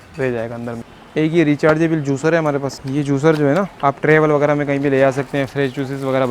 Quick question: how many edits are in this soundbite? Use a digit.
3